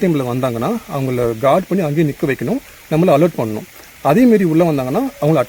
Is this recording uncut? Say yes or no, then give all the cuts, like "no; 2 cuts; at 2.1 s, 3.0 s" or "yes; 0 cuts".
yes; 0 cuts